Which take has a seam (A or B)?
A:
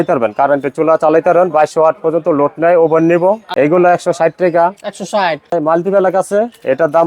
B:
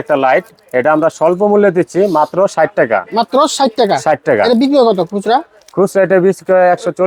A